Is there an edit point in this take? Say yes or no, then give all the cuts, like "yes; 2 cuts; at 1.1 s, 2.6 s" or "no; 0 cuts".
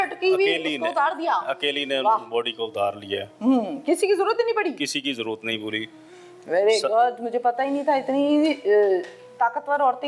no; 0 cuts